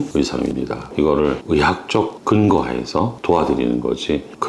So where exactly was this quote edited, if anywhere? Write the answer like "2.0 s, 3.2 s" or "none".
0.8 s, 3.2 s